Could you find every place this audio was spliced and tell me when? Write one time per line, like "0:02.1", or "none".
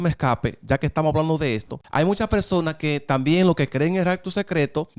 0:01.7